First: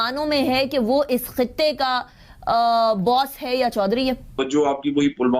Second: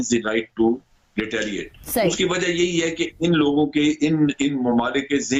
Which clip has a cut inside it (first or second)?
first